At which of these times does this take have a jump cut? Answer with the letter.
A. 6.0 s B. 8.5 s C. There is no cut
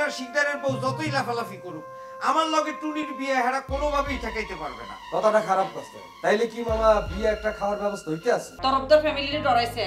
B